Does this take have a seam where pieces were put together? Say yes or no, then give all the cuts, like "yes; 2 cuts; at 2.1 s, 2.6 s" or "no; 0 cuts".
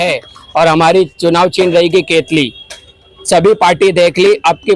no; 0 cuts